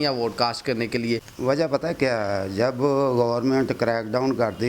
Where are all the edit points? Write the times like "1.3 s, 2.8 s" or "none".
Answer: 1.3 s